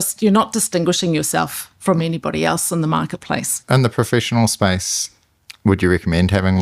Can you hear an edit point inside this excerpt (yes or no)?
yes